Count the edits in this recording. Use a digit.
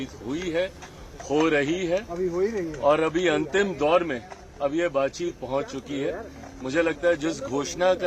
0